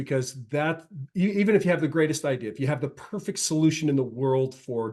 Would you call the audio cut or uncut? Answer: uncut